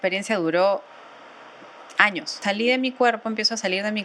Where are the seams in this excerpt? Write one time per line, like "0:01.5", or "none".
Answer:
0:02.4